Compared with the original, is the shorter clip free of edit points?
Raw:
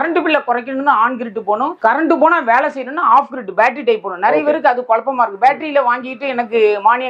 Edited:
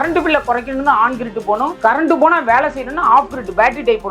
yes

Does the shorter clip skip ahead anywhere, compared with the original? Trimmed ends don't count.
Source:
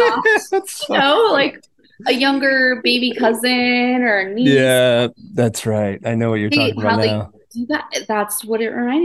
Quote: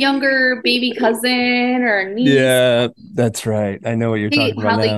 no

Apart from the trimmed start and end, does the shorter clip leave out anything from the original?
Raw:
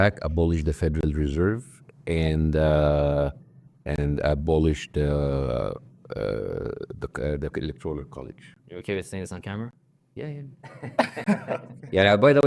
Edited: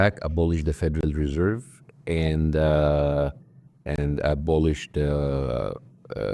no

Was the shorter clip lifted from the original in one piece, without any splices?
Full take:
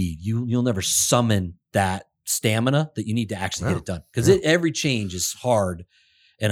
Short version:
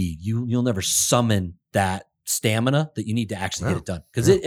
yes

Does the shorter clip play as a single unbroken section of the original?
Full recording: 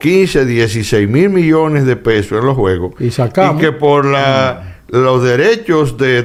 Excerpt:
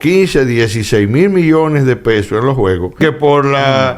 no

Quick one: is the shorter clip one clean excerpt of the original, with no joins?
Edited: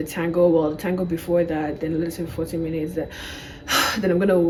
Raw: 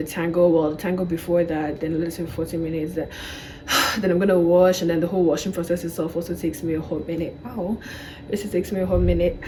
yes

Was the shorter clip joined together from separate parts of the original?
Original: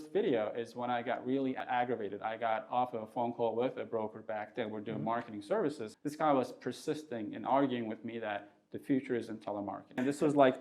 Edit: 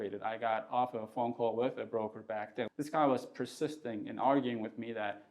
yes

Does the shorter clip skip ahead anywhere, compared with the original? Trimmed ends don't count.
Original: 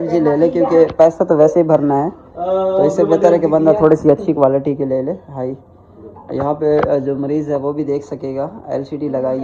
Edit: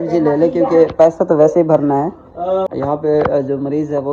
yes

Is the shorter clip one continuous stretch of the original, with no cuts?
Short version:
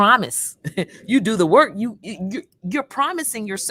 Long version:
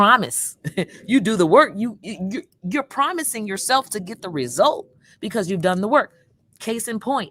yes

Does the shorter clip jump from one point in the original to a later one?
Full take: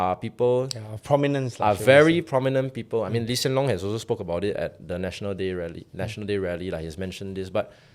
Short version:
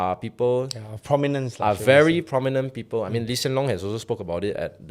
no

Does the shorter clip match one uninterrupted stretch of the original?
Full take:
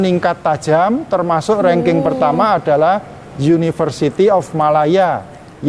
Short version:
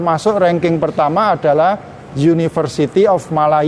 yes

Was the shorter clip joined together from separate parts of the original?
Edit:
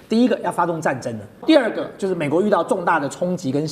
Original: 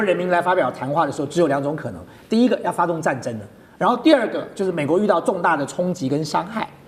yes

